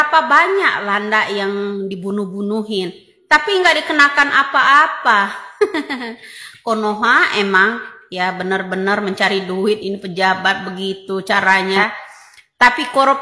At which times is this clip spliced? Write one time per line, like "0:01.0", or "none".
0:11.8